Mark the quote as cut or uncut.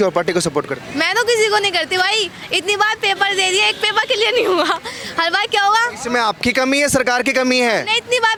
uncut